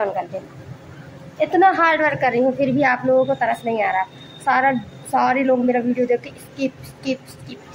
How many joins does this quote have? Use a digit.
0